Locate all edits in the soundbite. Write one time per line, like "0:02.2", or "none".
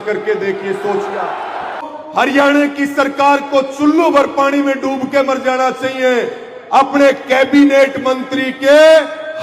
0:01.9